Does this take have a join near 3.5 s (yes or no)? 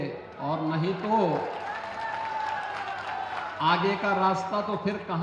no